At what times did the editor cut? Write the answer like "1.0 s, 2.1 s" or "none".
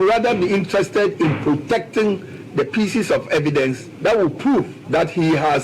3.9 s, 4.8 s

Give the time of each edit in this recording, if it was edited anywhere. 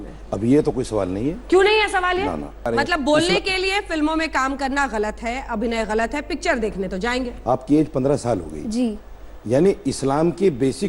2.6 s, 7.3 s

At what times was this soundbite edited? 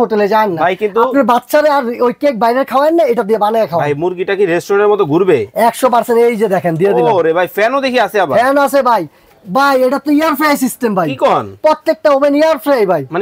none

